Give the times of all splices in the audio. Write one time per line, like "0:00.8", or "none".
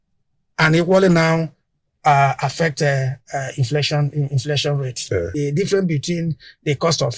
0:05.3